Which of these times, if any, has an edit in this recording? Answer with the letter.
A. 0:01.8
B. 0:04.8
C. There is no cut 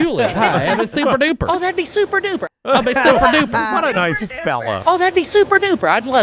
B